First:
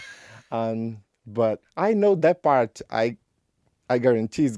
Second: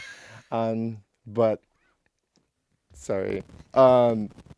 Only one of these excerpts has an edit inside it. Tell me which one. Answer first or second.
first